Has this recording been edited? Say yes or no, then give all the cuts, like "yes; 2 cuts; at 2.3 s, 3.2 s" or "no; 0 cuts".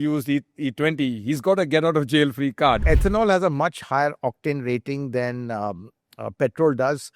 yes; 1 cut; at 2.8 s